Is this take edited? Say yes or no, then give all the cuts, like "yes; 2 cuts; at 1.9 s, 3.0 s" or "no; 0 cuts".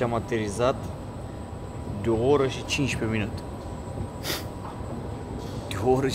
no; 0 cuts